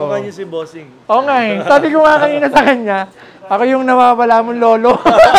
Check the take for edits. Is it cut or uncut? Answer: uncut